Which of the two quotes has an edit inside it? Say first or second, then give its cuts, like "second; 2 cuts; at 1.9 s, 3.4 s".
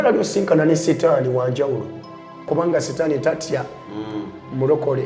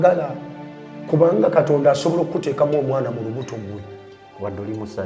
first; 1 cut; at 2.3 s